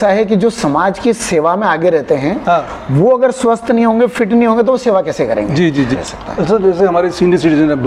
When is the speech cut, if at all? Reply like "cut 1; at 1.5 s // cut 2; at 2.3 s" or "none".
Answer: cut 1; at 5.9 s